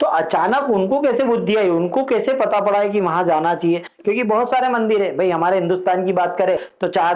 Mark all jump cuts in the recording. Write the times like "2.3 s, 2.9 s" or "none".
none